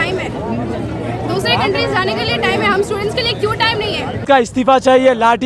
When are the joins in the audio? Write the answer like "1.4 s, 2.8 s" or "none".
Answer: 4.2 s